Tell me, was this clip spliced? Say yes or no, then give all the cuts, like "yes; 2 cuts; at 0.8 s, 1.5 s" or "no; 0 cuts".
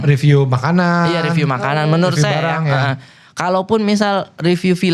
no; 0 cuts